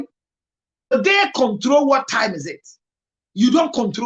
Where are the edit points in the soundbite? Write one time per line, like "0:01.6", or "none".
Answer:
0:00.9